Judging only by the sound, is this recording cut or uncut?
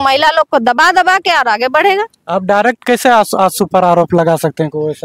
uncut